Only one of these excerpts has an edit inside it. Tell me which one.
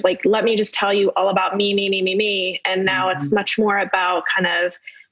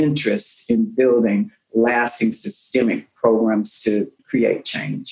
second; 1 cut; at 4.2 s

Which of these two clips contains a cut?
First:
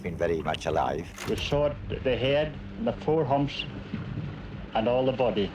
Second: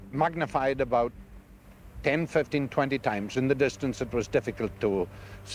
first; 1 cut; at 1.1 s

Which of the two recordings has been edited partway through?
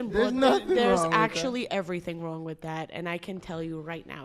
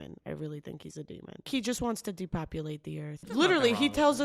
second; 2 cuts; at 1.5 s, 3.2 s

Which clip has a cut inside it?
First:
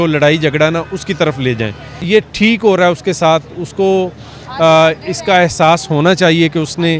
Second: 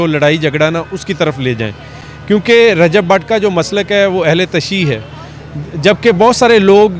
first; 1 cut; at 2.0 s

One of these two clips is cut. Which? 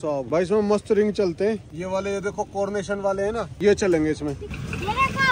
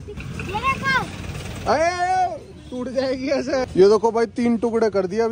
second; 1 cut; at 3.7 s

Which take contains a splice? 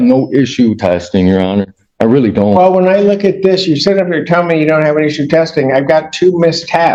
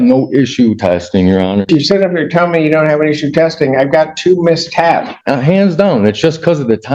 second; 2 cuts; at 1.7 s, 5.2 s

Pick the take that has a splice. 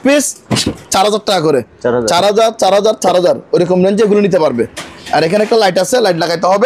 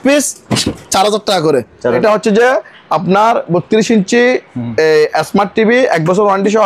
second; 1 cut; at 2.0 s

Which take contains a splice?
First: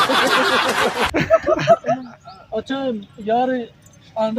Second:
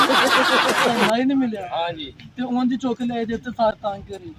second; 1 cut; at 1.1 s

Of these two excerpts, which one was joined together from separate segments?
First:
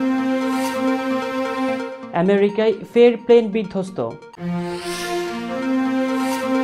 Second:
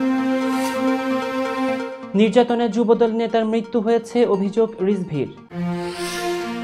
second; 1 cut; at 2.0 s

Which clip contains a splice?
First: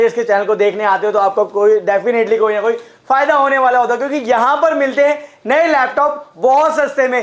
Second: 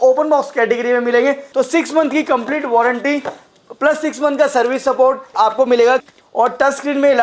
second; 3 cuts; at 1.4 s, 5.3 s, 6.1 s

